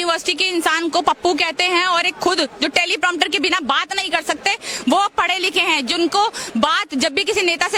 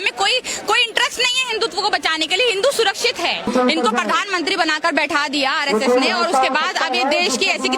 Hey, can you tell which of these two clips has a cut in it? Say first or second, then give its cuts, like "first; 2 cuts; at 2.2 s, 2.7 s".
second; 1 cut; at 3.5 s